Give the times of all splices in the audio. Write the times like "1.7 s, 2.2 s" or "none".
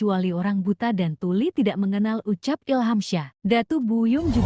none